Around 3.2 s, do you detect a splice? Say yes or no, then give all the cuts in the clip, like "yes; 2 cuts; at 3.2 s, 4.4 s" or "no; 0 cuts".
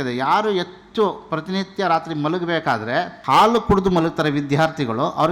yes; 1 cut; at 3.2 s